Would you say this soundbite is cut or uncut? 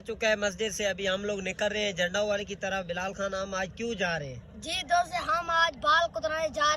uncut